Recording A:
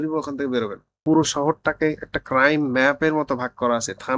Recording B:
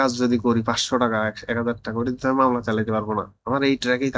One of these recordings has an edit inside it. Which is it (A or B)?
A